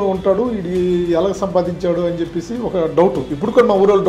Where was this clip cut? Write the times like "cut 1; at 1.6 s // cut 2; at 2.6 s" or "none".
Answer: none